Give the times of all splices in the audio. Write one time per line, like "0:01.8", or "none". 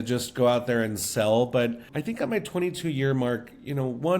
0:01.9